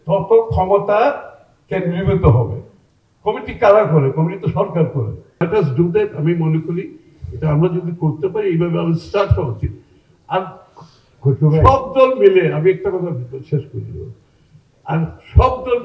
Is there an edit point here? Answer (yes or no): yes